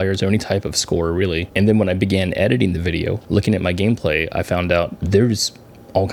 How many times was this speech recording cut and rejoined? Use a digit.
0